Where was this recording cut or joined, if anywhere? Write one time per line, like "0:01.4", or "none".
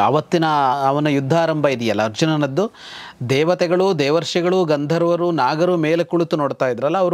none